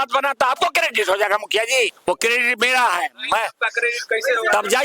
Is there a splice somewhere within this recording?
yes; 1 cut; at 2.0 s

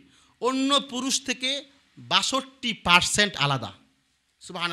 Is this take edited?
no; 0 cuts

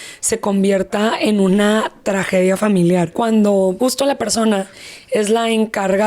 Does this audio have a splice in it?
yes; 2 cuts; at 3.1 s, 3.8 s

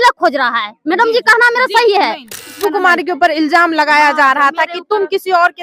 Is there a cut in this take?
yes; 1 cut; at 2.5 s

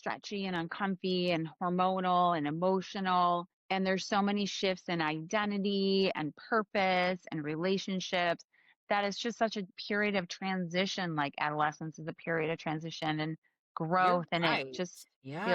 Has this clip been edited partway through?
yes; 2 cuts; at 3.6 s, 9.7 s

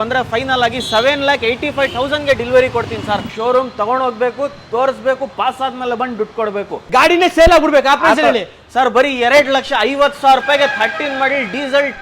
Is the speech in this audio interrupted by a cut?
yes; 2 cuts; at 3.3 s, 6.8 s

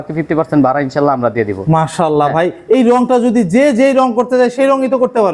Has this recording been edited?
no; 0 cuts

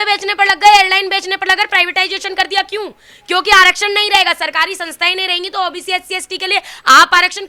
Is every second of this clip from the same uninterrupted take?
yes; 0 cuts

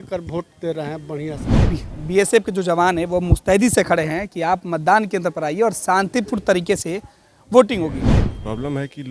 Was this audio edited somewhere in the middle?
yes; 2 cuts; at 1.5 s, 8.1 s

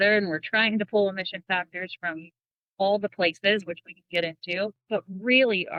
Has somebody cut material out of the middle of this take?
no; 0 cuts

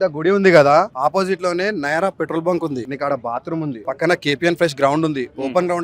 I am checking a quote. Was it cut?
yes; 3 cuts; at 0.9 s, 2.9 s, 3.8 s

